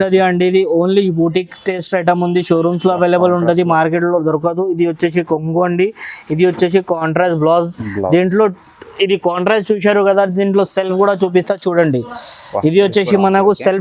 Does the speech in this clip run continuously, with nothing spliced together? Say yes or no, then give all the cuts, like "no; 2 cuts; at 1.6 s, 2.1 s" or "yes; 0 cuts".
yes; 0 cuts